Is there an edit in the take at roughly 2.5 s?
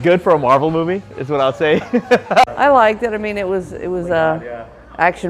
yes; 1 cut; at 2.5 s

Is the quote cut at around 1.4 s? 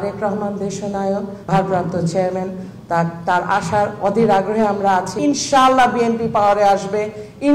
yes; 2 cuts; at 1.4 s, 5.1 s

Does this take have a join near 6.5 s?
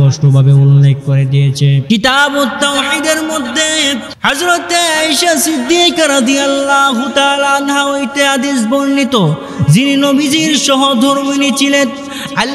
no; 2 cuts; at 1.8 s, 4.1 s

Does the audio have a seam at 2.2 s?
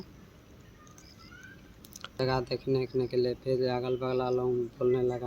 yes; 1 cut; at 2.2 s

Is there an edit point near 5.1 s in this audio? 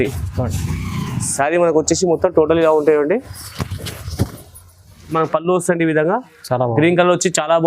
yes; 1 cut; at 5.1 s

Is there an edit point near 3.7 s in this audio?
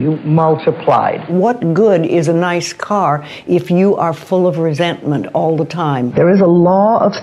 no; 2 cuts; at 1.3 s, 6.1 s

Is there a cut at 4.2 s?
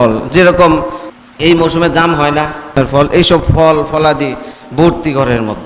no; 2 cuts; at 1.0 s, 2.8 s

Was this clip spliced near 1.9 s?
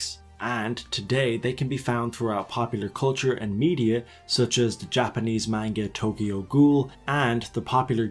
yes; 1 cut; at 1.9 s

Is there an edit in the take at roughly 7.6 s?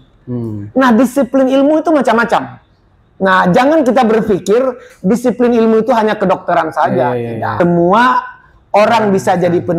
yes; 1 cut; at 7.6 s

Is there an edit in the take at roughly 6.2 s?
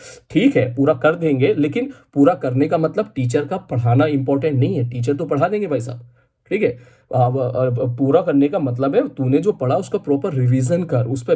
no; 0 cuts

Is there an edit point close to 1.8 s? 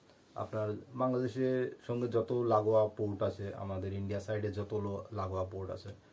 no; 0 cuts

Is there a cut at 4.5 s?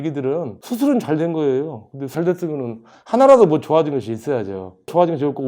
no; 0 cuts

